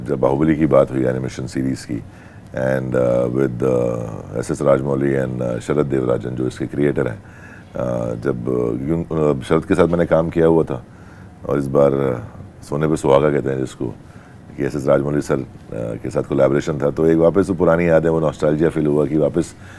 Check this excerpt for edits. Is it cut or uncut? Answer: uncut